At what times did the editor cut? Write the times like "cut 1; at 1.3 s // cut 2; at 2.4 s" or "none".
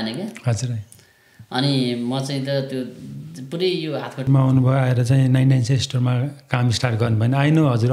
cut 1; at 4.3 s